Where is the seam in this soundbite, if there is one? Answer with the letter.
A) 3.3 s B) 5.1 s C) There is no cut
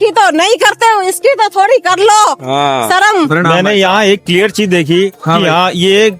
A